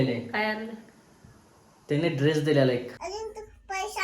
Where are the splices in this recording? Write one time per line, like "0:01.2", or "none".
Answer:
0:03.0

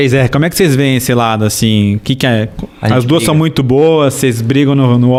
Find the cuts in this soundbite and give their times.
none

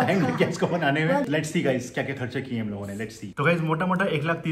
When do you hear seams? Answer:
0:01.3
0:03.2

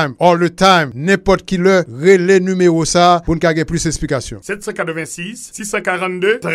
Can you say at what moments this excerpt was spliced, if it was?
none

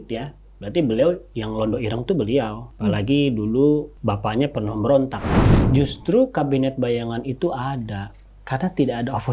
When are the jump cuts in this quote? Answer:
0:02.6
0:03.9
0:05.7

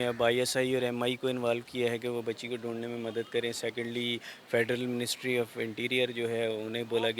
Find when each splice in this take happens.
none

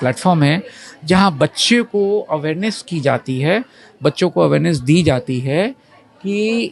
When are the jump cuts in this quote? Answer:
none

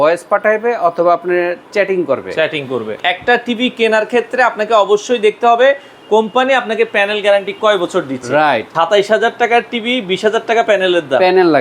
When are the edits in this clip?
0:02.9
0:08.7

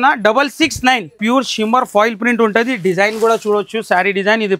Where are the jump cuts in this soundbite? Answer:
0:01.2

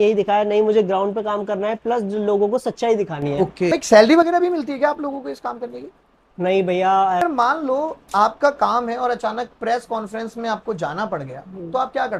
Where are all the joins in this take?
0:03.7
0:07.2

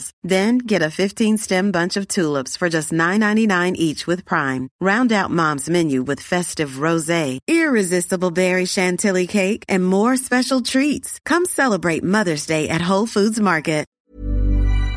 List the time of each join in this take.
0:14.0

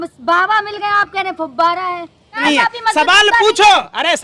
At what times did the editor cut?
0:02.4

